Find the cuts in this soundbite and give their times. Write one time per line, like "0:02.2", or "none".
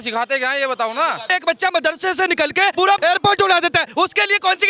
0:01.2
0:02.8